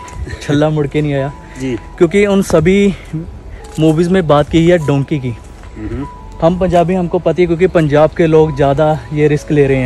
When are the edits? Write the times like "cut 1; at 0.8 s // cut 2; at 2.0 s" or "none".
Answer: none